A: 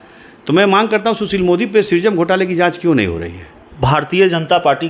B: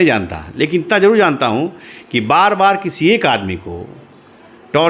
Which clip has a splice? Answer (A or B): A